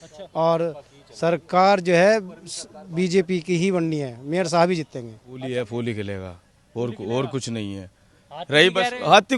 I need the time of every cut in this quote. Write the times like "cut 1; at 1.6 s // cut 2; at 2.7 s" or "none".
cut 1; at 5.4 s

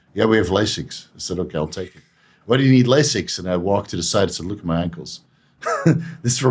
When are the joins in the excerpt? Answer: none

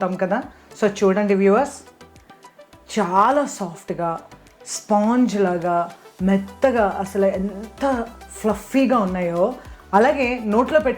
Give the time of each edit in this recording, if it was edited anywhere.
cut 1; at 9.7 s

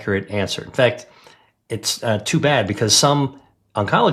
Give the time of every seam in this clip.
none

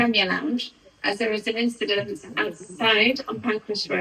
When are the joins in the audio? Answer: none

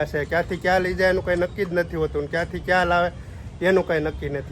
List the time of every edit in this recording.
none

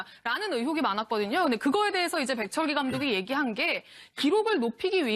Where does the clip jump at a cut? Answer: none

